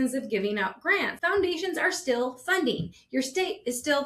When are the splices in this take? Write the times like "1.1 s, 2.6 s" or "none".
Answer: 1.1 s